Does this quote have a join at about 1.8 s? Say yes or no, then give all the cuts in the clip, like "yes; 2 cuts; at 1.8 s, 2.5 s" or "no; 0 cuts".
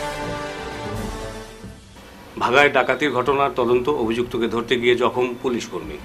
yes; 1 cut; at 1.8 s